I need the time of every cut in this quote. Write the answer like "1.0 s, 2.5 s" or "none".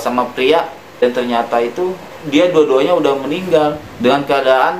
1.0 s, 3.8 s